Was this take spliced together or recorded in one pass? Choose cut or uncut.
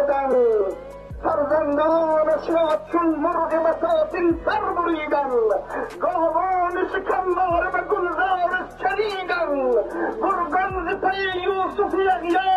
uncut